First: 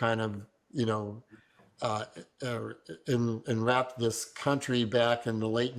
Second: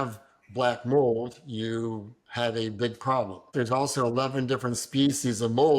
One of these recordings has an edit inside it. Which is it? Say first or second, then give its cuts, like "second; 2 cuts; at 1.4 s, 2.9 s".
second; 1 cut; at 3.5 s